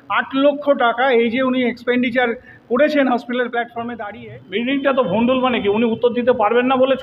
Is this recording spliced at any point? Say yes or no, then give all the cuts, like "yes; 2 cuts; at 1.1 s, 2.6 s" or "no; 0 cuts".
yes; 1 cut; at 3.9 s